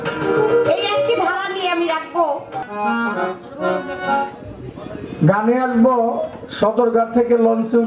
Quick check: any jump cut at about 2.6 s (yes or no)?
yes